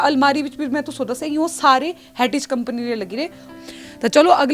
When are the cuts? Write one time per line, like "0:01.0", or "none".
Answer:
0:03.5